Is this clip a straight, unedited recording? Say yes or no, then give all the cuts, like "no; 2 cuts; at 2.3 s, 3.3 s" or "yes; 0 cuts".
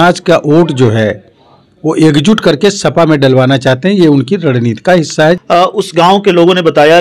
no; 1 cut; at 5.4 s